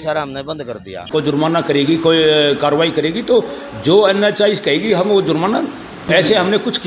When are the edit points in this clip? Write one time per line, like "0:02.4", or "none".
0:01.0
0:05.9

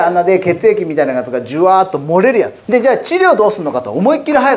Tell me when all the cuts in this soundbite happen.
0:02.6

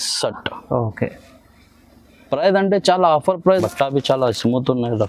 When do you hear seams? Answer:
0:03.4

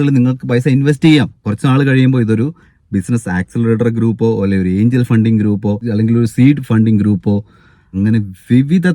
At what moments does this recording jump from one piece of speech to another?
0:01.4

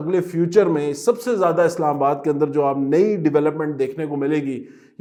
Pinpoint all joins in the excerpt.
none

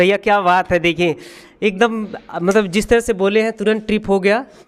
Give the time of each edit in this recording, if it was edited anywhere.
none

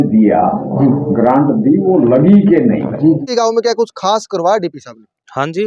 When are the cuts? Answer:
0:03.2

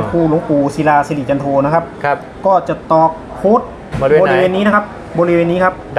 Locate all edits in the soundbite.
none

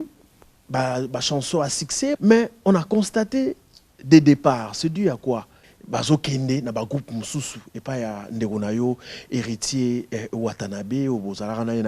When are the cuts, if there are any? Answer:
0:02.2
0:05.7

